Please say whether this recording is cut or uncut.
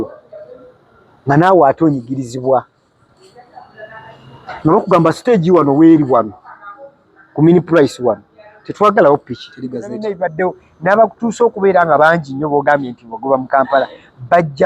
cut